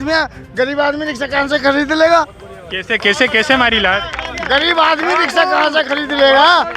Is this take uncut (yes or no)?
yes